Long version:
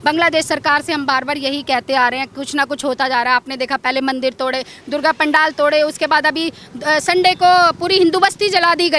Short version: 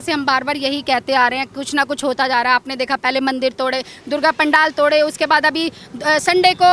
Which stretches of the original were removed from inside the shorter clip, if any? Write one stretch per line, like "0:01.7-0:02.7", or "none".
none